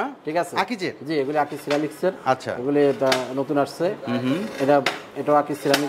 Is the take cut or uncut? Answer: uncut